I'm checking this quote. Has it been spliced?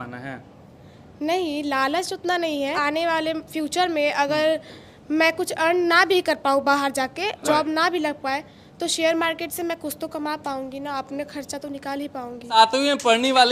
yes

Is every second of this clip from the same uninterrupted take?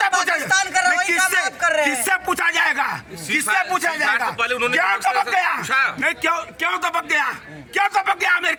yes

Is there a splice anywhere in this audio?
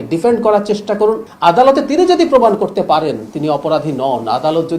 yes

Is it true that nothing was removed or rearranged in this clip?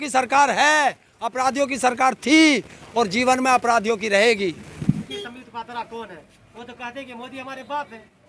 no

